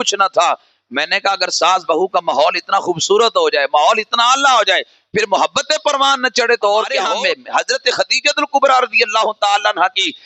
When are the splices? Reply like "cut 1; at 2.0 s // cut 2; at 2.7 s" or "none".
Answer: cut 1; at 7.1 s